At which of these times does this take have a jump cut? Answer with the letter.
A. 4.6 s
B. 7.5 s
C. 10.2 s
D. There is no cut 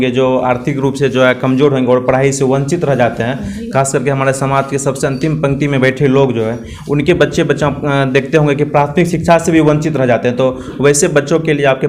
D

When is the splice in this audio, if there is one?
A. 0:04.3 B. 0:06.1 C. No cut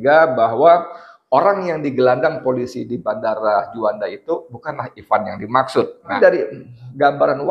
B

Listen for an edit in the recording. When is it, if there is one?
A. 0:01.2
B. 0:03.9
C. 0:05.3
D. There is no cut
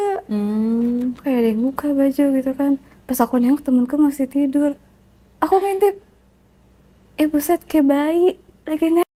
D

